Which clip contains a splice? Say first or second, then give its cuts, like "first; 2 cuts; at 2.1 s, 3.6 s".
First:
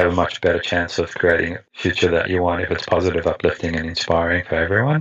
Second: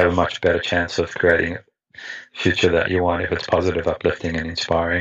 first; 1 cut; at 1.6 s